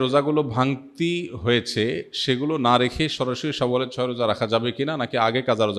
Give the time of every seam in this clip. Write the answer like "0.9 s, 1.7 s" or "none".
none